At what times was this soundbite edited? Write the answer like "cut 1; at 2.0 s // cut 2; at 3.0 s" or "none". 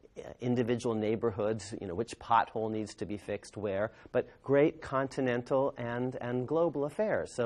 none